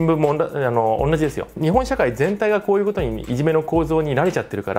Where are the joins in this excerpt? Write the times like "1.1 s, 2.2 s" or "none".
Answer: 1.5 s